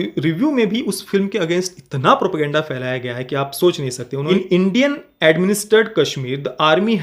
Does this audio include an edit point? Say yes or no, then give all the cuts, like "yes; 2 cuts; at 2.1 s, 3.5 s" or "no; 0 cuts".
yes; 1 cut; at 4.2 s